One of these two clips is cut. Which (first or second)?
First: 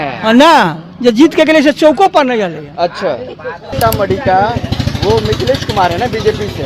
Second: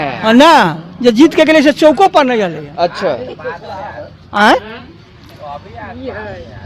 first